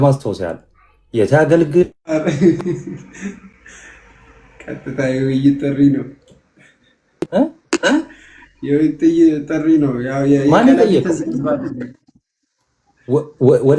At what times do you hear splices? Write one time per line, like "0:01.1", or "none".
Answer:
none